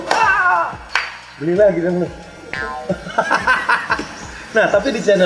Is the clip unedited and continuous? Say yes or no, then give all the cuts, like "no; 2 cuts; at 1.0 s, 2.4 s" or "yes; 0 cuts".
yes; 0 cuts